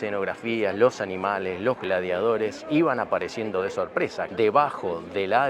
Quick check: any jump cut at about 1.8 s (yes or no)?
no